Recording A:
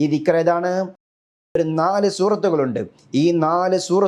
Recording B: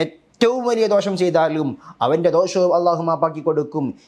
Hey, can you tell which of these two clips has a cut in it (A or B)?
A